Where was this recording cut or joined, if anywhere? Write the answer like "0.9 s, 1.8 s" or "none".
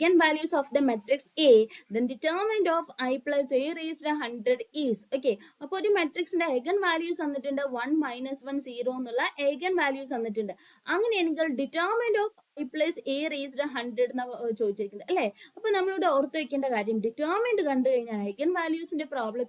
9.3 s